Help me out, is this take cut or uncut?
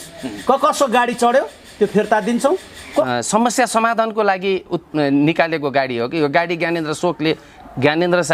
cut